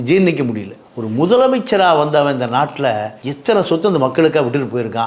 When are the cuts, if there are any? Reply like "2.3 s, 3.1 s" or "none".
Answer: none